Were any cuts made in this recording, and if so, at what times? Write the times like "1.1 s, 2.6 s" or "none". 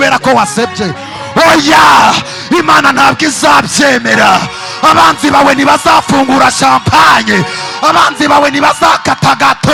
none